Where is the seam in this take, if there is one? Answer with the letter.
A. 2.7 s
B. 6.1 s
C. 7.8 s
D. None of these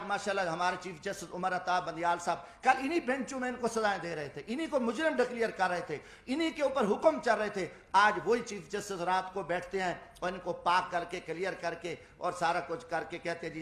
D